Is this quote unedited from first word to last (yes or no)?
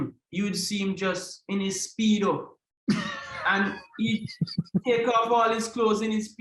yes